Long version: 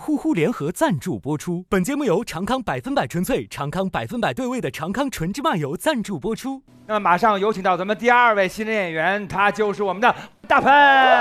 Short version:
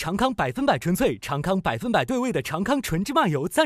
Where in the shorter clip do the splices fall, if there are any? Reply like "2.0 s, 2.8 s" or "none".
none